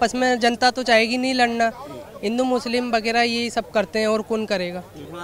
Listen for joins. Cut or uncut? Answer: uncut